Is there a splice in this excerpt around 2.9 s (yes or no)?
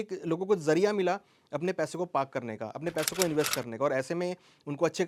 no